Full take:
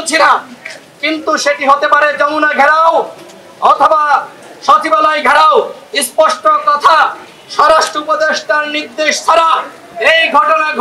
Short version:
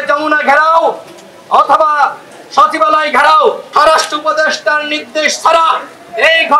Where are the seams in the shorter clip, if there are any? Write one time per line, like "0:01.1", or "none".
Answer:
0:03.6

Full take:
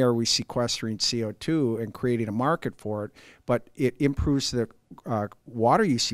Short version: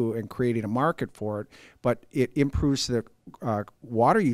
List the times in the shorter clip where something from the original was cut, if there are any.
none

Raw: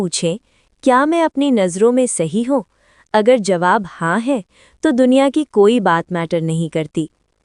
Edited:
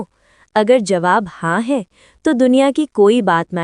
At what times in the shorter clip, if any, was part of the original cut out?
none

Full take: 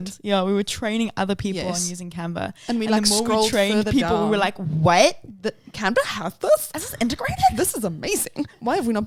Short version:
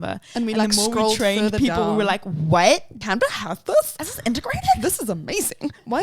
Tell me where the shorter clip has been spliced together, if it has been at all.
0:02.9

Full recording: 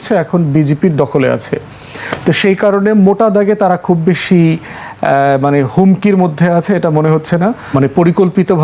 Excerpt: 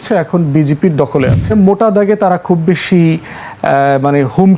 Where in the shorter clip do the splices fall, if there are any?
0:01.5

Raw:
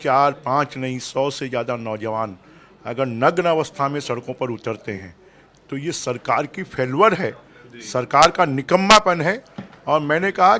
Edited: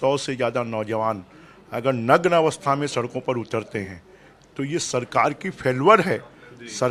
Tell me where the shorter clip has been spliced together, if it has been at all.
none

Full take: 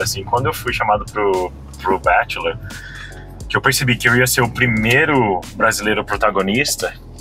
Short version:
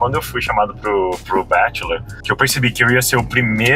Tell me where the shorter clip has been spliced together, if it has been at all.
0:01.2
0:02.1

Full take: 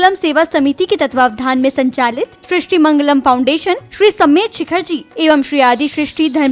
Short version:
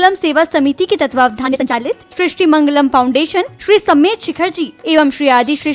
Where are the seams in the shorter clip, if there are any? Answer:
0:01.6

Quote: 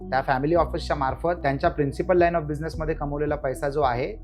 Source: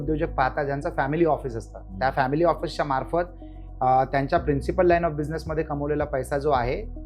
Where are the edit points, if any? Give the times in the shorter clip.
0:01.4

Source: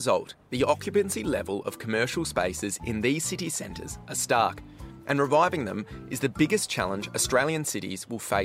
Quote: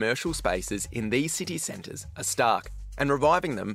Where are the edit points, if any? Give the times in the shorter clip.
0:02.8

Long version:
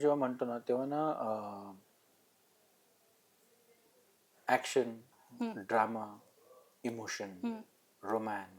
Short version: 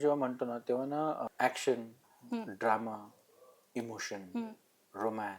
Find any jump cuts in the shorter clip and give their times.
0:01.3

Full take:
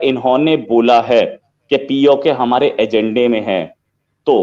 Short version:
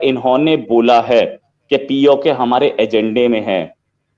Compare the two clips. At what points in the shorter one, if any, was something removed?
none

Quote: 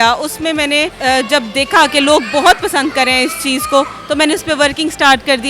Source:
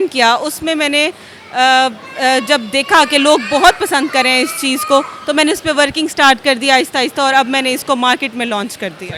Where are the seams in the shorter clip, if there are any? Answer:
0:00.9

